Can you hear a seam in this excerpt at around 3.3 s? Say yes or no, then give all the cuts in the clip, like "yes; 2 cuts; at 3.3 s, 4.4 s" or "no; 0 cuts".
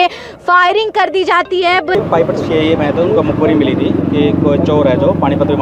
no; 1 cut; at 1.9 s